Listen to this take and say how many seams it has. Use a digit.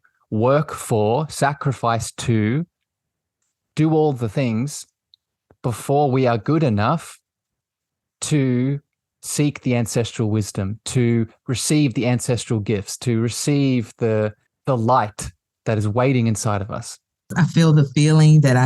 2